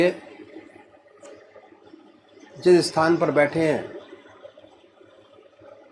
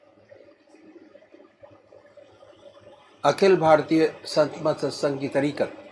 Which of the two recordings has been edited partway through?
second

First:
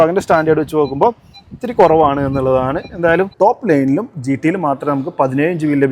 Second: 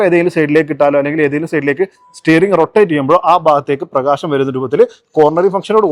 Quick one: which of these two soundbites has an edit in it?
first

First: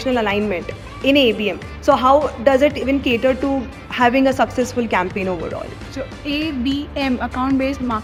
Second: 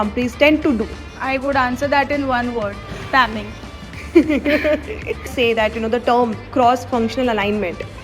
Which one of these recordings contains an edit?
second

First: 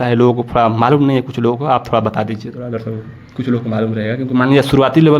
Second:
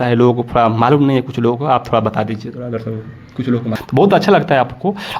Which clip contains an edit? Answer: second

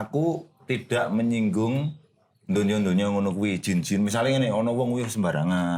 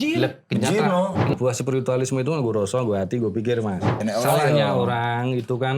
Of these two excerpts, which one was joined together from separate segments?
second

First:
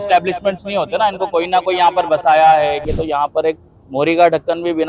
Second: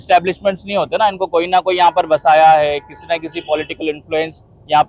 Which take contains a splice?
first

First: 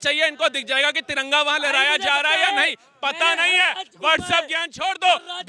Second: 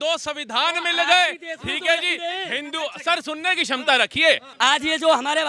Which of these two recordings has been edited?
second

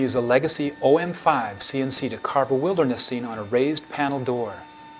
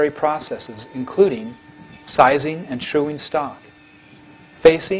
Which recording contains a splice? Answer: second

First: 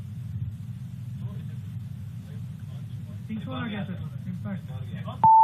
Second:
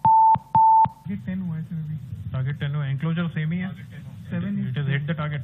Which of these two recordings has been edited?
second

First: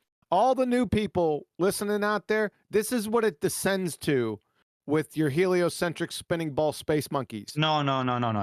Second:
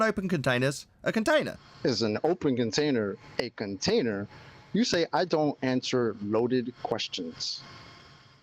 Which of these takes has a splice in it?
second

